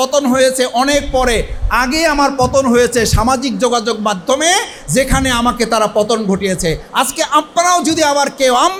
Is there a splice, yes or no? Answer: no